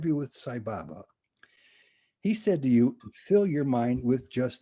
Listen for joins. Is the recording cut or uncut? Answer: cut